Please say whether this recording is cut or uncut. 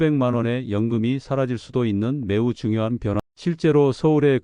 cut